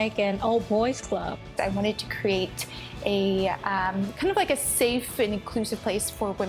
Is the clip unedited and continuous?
no; 1 cut; at 1.4 s

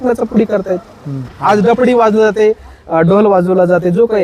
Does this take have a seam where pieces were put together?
yes; 1 cut; at 1.3 s

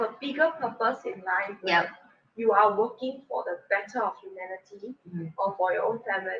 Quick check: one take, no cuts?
yes; 0 cuts

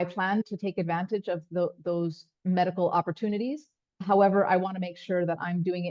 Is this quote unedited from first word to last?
yes; 0 cuts

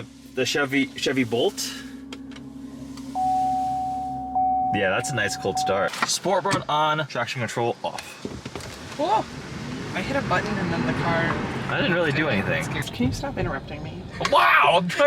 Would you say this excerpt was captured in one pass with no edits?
no; 2 cuts; at 5.9 s, 12.8 s

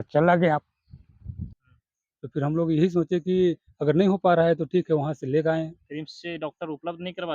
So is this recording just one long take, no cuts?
no; 1 cut; at 1.4 s

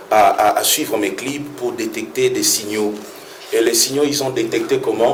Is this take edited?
no; 0 cuts

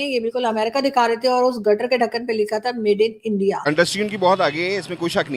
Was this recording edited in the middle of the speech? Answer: yes; 1 cut; at 3.6 s

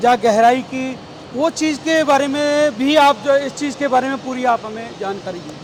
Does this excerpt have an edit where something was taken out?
no; 0 cuts

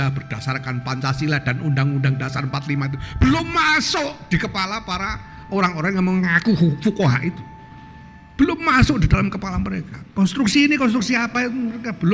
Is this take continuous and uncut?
yes; 0 cuts

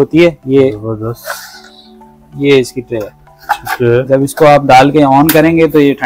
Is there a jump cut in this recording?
no; 0 cuts

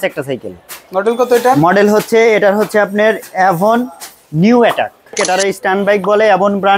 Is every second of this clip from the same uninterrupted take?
no; 1 cut; at 5.2 s

